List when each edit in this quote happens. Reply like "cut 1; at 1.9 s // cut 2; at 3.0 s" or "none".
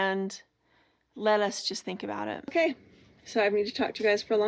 cut 1; at 2.4 s

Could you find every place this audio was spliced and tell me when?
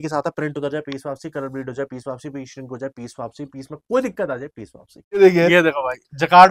cut 1; at 5.2 s

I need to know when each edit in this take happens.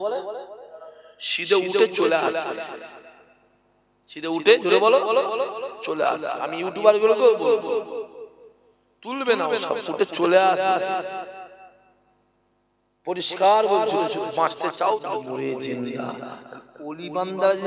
cut 1; at 15.2 s

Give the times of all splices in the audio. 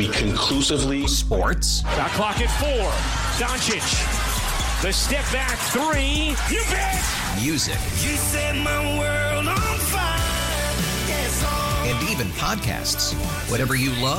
none

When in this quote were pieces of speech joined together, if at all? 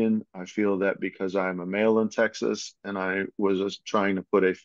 none

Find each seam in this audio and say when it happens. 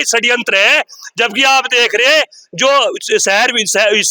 none

